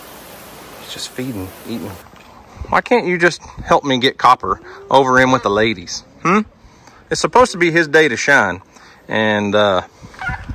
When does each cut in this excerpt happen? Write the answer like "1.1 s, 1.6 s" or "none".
1.9 s